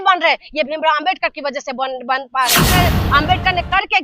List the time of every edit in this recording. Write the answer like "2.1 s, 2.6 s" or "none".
2.7 s